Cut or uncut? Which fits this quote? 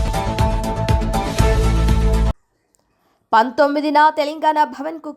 uncut